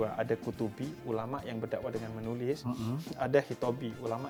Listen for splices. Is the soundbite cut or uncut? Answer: uncut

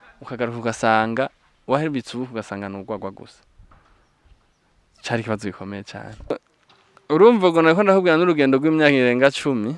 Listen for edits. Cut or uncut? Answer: cut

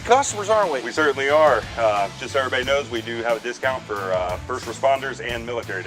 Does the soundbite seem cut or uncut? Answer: uncut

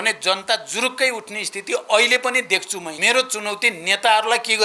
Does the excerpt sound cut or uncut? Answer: cut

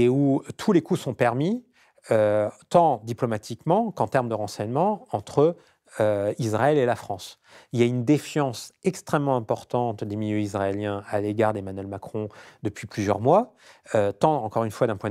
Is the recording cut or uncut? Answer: uncut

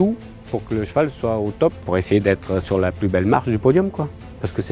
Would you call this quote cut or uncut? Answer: cut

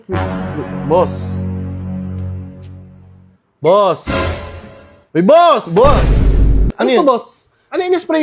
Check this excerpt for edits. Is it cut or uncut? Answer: cut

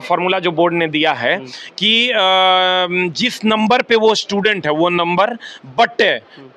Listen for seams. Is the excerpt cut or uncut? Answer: uncut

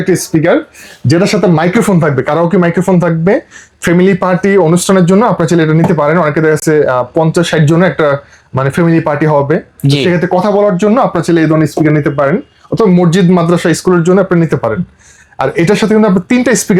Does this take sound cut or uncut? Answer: uncut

